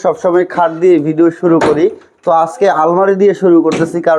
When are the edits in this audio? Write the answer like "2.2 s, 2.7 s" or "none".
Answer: none